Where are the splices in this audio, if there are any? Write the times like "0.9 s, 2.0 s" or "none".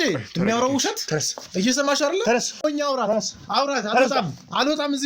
2.6 s